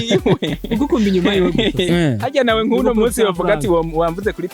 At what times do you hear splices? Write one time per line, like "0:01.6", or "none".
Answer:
none